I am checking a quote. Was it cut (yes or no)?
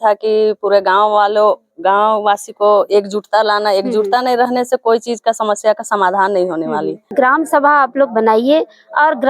yes